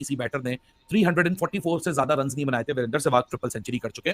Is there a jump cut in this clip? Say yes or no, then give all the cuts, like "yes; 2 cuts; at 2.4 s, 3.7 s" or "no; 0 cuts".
no; 0 cuts